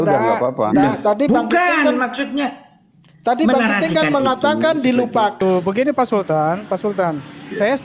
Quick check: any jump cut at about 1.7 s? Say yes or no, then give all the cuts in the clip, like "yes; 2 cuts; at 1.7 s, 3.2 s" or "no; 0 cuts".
no; 1 cut; at 5.4 s